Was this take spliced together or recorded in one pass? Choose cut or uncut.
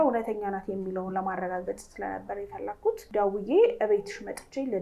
cut